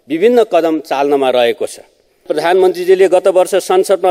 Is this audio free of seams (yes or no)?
no